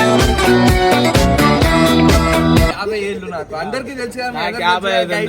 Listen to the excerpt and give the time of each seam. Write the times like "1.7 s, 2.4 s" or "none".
2.7 s